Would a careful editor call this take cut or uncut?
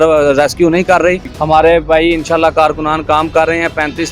cut